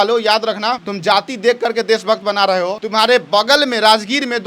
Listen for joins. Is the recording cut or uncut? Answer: cut